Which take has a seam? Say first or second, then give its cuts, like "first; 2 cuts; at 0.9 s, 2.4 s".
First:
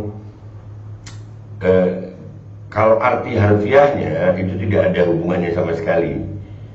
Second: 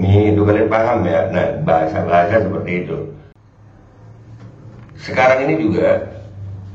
second; 1 cut; at 3.3 s